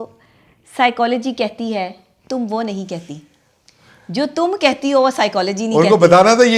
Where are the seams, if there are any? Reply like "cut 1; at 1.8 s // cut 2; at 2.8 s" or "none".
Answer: none